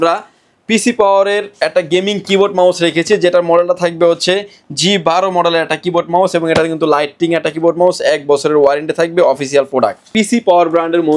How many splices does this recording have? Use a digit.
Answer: 1